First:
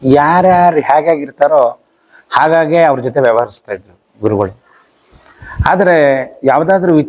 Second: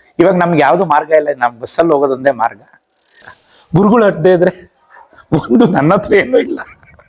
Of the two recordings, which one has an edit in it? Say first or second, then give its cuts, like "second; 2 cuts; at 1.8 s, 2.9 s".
second; 1 cut; at 3.3 s